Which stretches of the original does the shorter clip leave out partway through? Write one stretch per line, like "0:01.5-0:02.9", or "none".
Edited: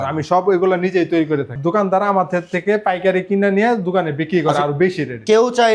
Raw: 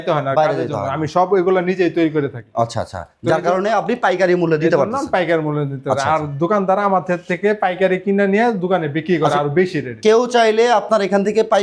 0:02.4-0:06.3